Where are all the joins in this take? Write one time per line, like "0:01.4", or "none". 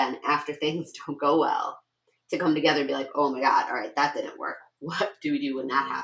none